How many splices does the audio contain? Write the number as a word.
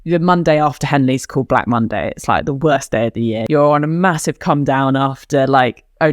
one